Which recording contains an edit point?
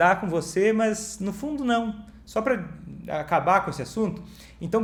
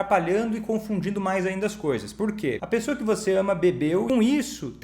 second; 2 cuts; at 2.6 s, 4.1 s

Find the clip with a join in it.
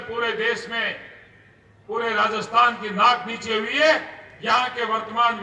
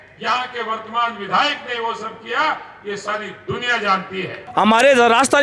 second; 1 cut; at 4.4 s

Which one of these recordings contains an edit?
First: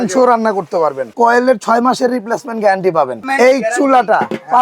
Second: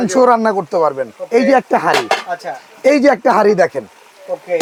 first; 2 cuts; at 1.1 s, 3.2 s

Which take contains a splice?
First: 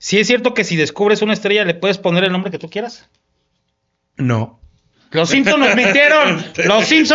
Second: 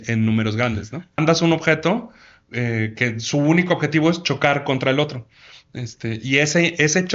second; 1 cut; at 1.2 s

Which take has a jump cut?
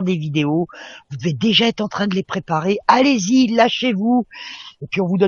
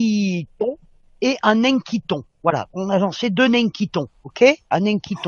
second; 1 cut; at 0.9 s

